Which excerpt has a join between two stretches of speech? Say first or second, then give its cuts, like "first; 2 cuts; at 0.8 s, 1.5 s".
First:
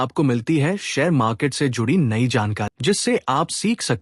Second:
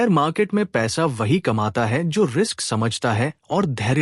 first; 1 cut; at 2.7 s